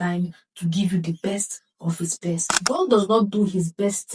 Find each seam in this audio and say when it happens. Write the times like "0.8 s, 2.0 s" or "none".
2.6 s

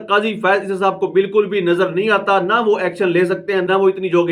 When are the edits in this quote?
none

